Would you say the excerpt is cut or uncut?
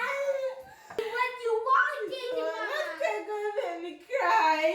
cut